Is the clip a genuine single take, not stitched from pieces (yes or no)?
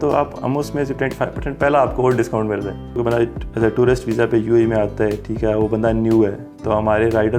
no